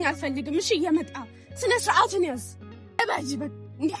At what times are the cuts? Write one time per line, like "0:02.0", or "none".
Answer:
0:03.0